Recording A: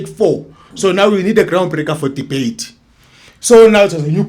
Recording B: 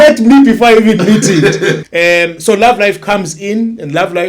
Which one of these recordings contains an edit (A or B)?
B